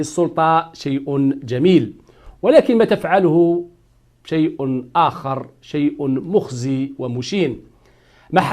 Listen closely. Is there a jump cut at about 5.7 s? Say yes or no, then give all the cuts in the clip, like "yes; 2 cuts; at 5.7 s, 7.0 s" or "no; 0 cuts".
no; 1 cut; at 2.8 s